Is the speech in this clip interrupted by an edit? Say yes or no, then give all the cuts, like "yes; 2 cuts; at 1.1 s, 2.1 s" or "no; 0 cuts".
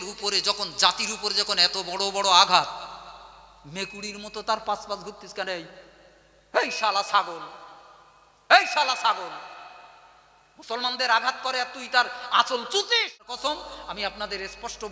yes; 1 cut; at 13.4 s